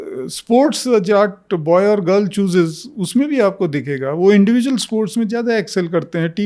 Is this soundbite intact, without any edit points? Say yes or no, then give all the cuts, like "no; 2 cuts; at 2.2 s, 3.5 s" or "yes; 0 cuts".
yes; 0 cuts